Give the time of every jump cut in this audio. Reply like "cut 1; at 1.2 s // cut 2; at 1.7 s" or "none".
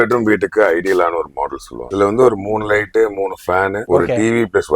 cut 1; at 1.8 s